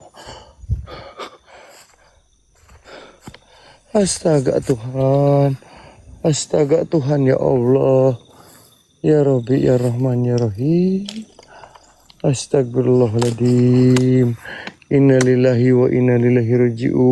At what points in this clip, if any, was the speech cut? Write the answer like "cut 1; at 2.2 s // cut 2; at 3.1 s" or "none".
cut 1; at 1.4 s

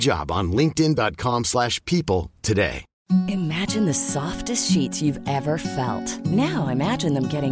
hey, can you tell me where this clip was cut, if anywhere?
cut 1; at 2.9 s

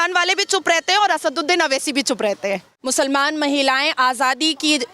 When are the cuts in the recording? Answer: cut 1; at 2.7 s

